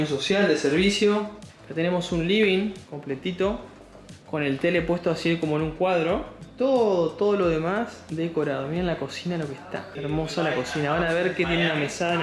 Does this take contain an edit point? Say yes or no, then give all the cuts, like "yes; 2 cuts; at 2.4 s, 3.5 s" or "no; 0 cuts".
no; 0 cuts